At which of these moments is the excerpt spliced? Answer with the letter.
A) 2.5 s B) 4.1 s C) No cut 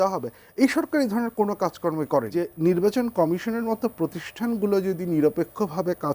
A